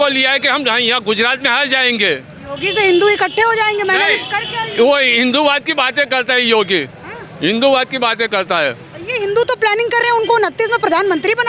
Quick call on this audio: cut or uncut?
uncut